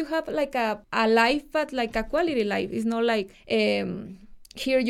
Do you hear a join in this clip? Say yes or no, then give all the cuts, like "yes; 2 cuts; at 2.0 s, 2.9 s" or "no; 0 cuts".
yes; 2 cuts; at 0.8 s, 3.4 s